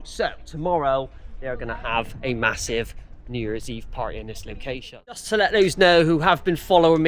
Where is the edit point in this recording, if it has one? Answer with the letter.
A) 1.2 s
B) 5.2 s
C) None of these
B